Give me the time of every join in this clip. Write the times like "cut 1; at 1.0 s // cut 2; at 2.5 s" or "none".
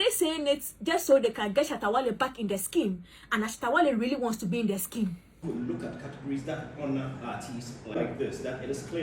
cut 1; at 5.4 s // cut 2; at 8.0 s